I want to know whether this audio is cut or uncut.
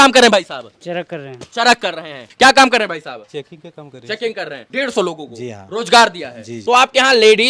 cut